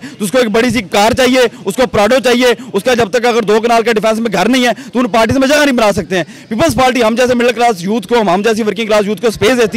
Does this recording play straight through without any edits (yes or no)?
yes